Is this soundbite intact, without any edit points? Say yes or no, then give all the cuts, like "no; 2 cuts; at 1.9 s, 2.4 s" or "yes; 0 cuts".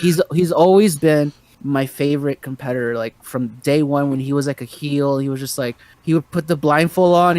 no; 1 cut; at 1.5 s